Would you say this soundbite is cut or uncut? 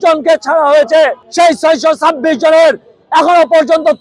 cut